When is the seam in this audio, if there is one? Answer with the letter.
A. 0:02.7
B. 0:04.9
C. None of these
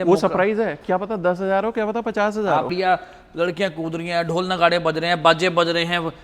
A